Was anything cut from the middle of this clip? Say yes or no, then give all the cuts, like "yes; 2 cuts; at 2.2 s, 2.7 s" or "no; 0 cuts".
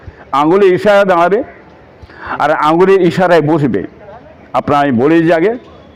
no; 0 cuts